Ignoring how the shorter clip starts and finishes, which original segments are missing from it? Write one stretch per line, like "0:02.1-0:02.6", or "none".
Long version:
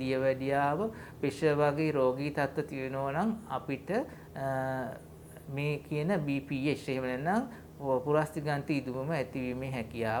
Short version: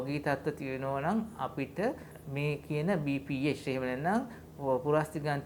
0:04.2-0:05.3